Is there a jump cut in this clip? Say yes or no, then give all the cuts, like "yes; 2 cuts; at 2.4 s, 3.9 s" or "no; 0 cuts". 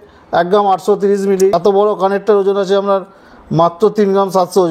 yes; 1 cut; at 1.5 s